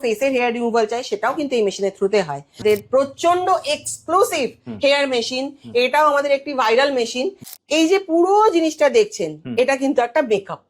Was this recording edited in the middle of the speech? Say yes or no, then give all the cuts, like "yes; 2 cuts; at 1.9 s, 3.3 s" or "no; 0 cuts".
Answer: yes; 2 cuts; at 2.5 s, 7.4 s